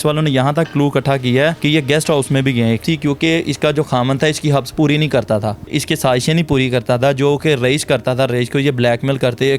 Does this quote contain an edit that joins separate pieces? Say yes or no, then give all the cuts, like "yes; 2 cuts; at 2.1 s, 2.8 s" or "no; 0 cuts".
yes; 3 cuts; at 1.6 s, 2.8 s, 5.7 s